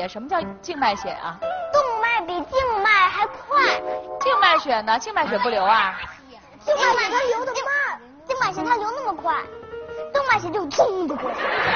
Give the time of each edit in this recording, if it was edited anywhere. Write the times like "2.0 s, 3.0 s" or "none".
none

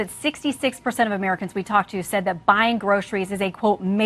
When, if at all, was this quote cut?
none

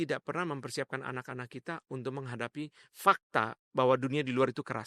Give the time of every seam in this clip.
none

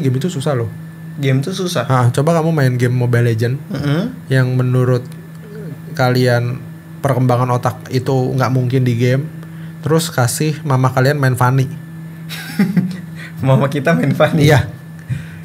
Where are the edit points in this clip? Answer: none

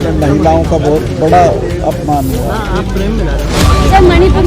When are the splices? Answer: 3.5 s

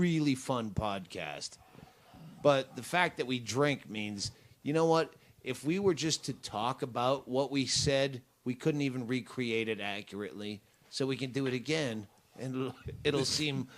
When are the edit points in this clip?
11.7 s

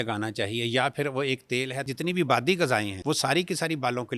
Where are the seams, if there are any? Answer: 1.8 s, 2.9 s

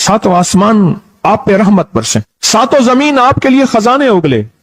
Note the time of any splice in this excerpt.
2.4 s

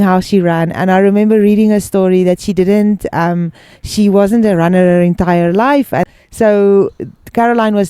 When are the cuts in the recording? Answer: 6.2 s

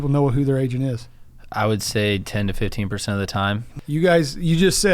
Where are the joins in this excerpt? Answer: 3.7 s

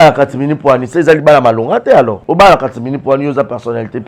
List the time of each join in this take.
2.2 s

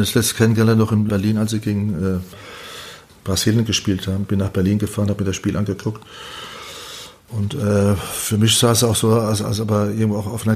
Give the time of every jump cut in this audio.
none

